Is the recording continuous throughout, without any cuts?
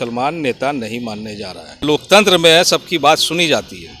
no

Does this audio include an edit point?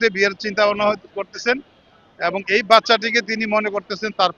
no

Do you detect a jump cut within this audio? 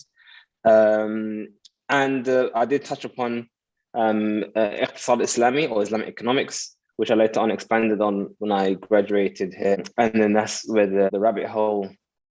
yes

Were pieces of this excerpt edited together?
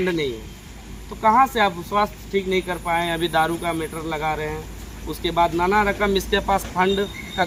no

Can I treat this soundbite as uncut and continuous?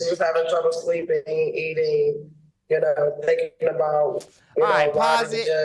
yes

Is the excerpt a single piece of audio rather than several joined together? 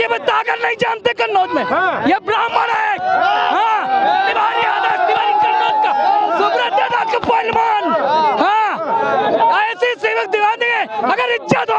yes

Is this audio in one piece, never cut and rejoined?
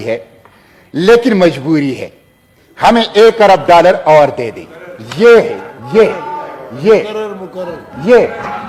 yes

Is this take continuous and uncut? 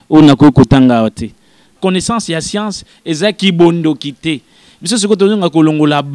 no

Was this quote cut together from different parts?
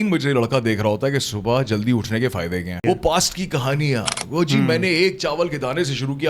yes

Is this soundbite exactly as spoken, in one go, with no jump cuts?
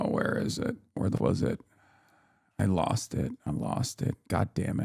no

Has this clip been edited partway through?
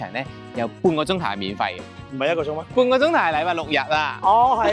no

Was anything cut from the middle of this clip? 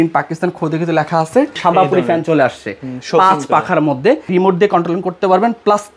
yes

